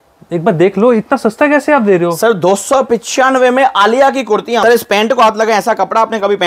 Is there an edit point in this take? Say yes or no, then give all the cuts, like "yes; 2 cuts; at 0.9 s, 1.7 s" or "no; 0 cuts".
yes; 1 cut; at 4.6 s